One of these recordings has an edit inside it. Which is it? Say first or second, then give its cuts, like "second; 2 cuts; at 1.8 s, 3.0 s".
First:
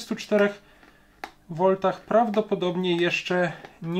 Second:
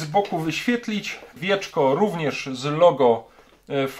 second; 1 cut; at 1.4 s